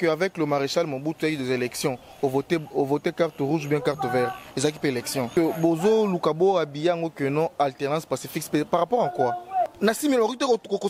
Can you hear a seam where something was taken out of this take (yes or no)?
yes